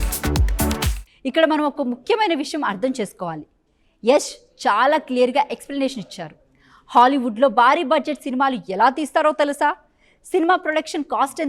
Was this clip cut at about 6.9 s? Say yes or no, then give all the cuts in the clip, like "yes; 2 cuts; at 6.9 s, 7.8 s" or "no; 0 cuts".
no; 1 cut; at 1.0 s